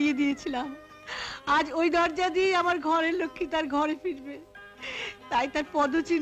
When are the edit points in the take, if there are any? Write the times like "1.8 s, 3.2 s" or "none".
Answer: none